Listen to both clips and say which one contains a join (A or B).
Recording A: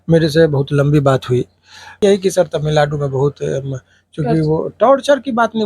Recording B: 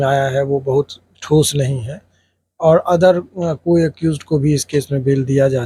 A